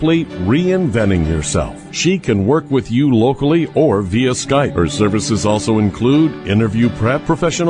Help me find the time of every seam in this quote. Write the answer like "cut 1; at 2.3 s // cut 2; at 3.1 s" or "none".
none